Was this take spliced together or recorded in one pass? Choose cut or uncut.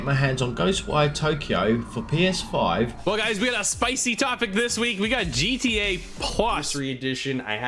cut